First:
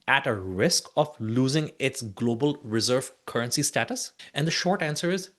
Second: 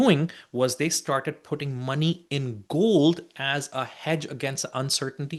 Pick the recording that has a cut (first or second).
first